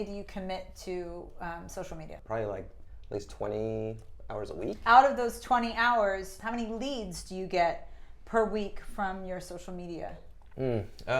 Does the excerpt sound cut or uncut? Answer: cut